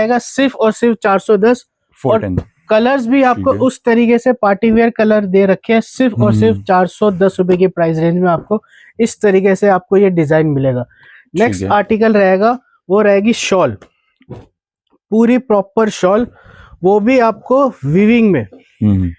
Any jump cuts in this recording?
no; 0 cuts

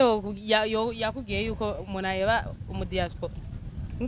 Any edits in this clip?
no; 0 cuts

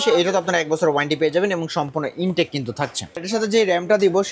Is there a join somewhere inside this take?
yes; 1 cut; at 3.2 s

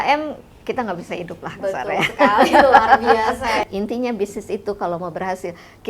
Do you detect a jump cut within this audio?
yes; 1 cut; at 3.7 s

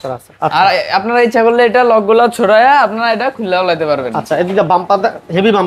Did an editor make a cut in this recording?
no; 0 cuts

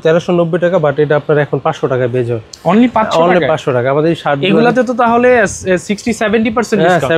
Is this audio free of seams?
yes; 0 cuts

